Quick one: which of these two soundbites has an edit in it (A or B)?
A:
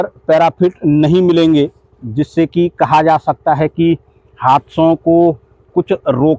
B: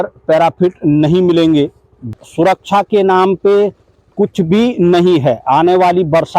B